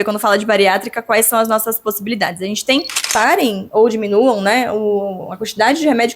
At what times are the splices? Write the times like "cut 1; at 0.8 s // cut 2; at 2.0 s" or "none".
cut 1; at 3.1 s